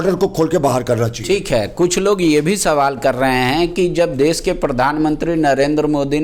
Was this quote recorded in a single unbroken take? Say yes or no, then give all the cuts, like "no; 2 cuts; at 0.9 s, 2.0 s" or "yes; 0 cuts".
yes; 0 cuts